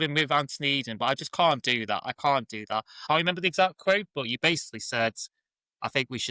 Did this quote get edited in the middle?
yes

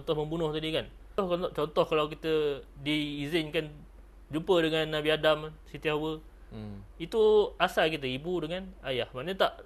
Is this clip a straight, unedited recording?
no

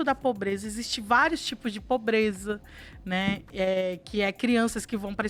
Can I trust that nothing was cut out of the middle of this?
yes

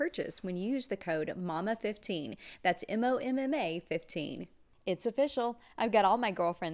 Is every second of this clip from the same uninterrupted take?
no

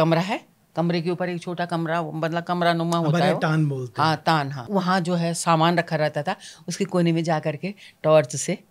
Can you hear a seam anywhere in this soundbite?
yes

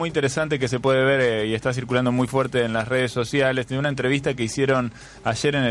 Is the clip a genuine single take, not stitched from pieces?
yes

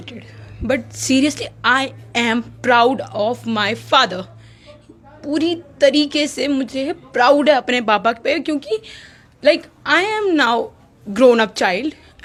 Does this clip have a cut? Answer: no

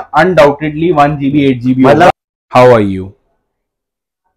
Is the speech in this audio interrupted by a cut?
yes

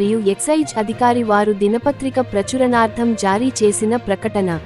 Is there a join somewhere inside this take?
no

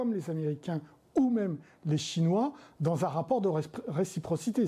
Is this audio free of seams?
yes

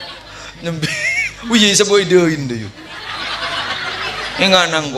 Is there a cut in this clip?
no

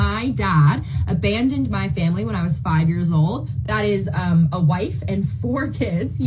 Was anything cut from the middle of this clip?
yes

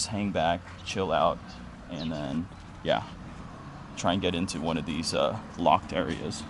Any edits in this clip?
no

